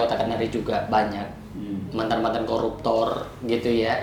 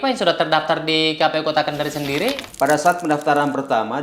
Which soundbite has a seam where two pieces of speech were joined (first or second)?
second